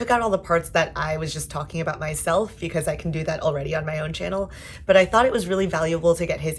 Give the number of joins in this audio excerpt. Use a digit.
0